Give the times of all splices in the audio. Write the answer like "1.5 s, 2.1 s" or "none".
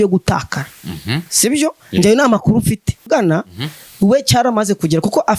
3.1 s